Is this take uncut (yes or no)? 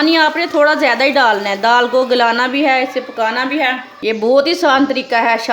no